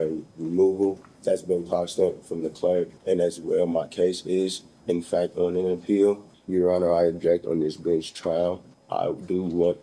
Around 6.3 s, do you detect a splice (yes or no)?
yes